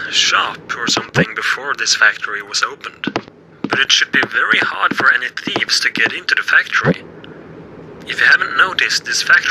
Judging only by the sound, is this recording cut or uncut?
cut